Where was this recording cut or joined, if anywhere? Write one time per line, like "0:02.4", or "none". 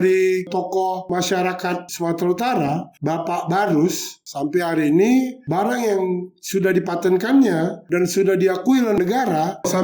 0:01.0
0:01.9

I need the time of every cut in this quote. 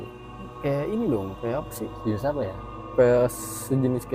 none

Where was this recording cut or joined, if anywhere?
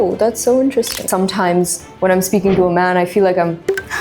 0:01.1

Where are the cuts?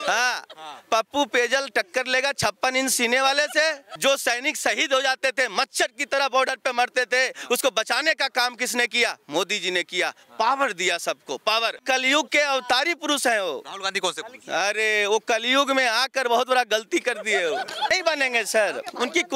0:03.9
0:11.8
0:17.9

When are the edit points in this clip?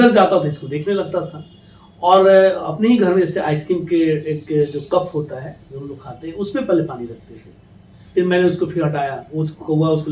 none

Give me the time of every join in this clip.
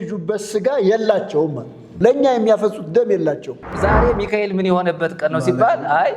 0:01.9
0:03.7

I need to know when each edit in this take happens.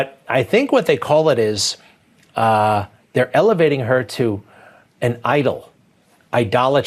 none

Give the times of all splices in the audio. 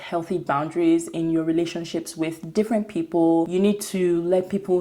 0:03.5

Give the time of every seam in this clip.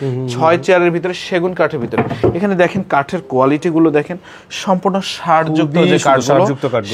none

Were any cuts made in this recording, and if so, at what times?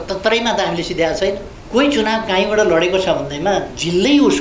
0:01.5

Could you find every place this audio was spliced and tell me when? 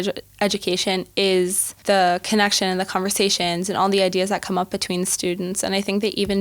0:01.7

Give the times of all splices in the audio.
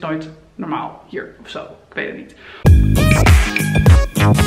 0:02.4

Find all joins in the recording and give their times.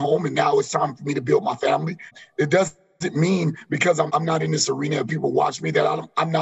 0:02.2
0:04.1

